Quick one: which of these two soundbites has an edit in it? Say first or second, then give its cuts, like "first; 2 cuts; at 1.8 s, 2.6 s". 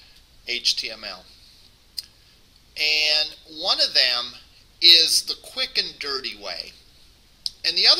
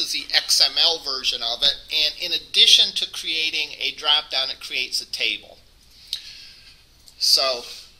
second; 1 cut; at 4.0 s